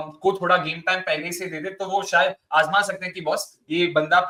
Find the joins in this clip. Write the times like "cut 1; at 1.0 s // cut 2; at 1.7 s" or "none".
none